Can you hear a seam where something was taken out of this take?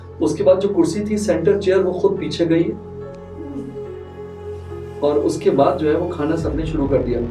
no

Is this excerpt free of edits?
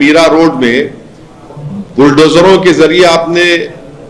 yes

